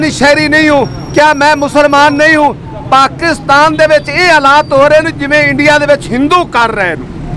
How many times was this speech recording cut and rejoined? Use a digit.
0